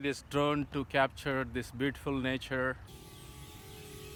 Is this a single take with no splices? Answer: yes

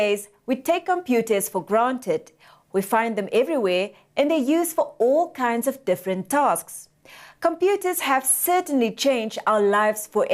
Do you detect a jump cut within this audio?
yes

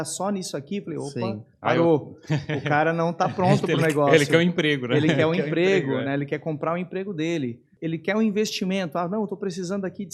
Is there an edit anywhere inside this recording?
yes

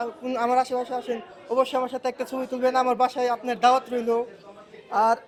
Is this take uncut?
yes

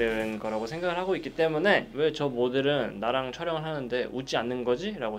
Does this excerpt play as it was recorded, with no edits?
yes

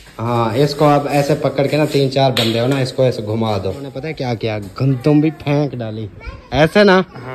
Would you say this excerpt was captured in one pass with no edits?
no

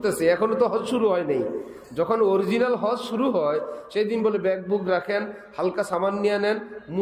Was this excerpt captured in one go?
yes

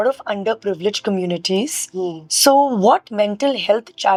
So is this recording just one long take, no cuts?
yes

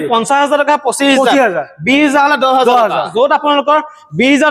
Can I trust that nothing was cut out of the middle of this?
no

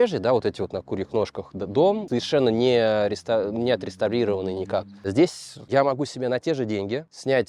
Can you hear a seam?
yes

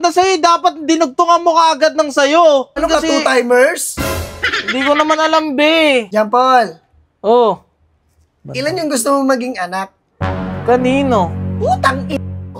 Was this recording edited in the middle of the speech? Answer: yes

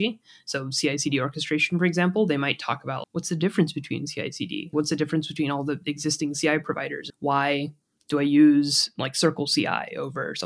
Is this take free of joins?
no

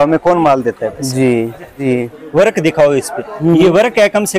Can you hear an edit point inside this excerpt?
yes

